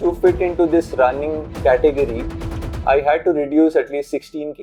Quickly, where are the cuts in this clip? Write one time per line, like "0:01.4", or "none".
none